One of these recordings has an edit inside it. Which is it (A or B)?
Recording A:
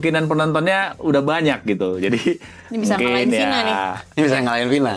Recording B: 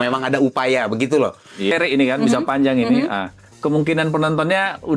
B